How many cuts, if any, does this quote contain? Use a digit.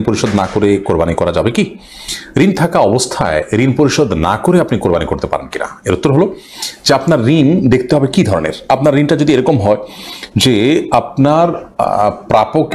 0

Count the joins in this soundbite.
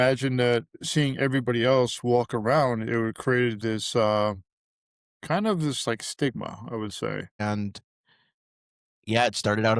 1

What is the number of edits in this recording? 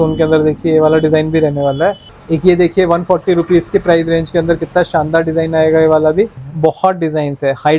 2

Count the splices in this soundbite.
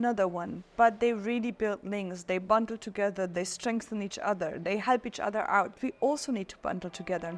1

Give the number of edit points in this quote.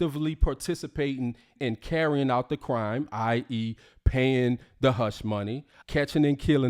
1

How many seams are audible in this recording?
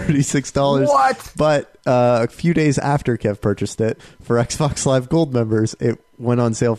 1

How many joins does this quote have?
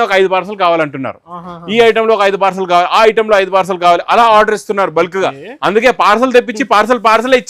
0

